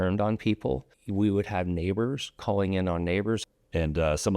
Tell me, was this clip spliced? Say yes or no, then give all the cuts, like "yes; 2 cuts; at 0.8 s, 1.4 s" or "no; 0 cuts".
yes; 2 cuts; at 1.0 s, 3.4 s